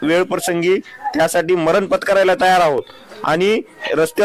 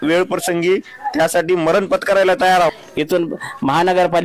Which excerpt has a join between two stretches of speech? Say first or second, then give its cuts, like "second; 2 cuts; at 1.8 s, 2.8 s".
second; 1 cut; at 2.7 s